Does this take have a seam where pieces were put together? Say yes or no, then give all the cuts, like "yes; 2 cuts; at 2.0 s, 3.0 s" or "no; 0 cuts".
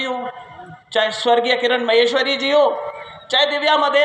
no; 0 cuts